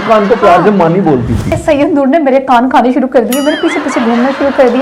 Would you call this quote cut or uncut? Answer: cut